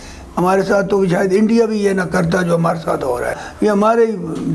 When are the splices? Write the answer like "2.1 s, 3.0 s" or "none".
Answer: 3.4 s